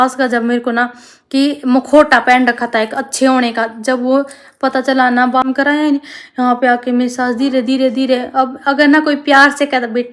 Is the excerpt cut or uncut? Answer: cut